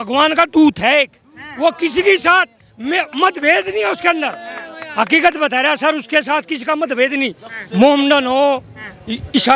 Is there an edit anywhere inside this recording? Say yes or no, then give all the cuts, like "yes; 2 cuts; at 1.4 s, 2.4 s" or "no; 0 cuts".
no; 0 cuts